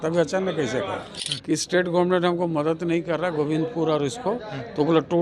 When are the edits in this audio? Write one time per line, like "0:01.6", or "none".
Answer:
0:01.2